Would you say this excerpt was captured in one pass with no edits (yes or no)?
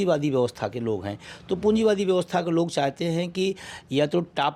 yes